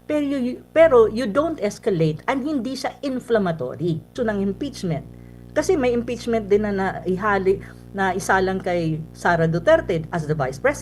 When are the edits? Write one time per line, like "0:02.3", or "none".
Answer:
0:04.1